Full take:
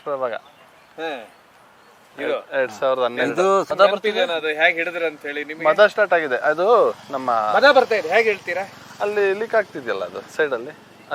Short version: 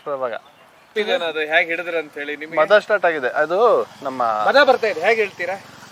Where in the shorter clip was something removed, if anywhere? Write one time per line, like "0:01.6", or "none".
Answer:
0:00.9